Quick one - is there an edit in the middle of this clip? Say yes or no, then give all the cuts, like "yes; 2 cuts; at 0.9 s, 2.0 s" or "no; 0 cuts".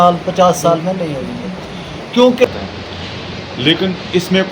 yes; 1 cut; at 2.4 s